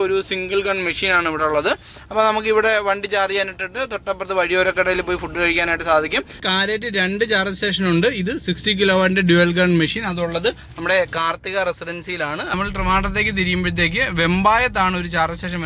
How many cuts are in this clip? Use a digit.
2